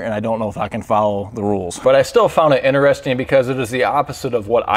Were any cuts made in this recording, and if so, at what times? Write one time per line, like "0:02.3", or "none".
0:01.8